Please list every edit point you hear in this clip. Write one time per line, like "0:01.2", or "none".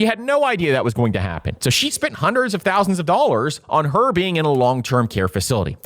0:01.5